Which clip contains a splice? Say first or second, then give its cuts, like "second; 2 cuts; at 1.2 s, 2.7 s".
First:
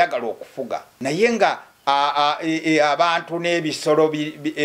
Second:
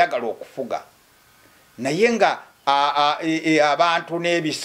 first; 1 cut; at 0.9 s